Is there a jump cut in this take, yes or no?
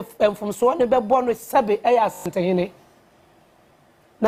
no